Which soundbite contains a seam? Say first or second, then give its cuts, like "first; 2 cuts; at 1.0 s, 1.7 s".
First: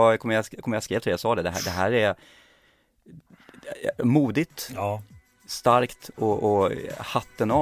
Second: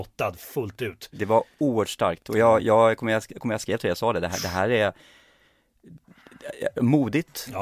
second; 1 cut; at 1.2 s